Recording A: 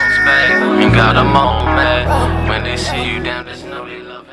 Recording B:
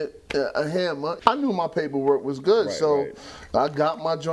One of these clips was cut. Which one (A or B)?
B